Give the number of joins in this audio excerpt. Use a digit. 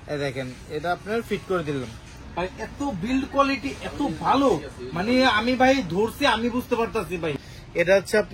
2